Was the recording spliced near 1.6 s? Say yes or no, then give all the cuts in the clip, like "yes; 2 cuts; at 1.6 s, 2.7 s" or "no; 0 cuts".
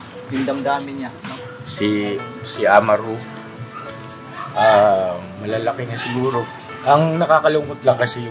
no; 1 cut; at 6.7 s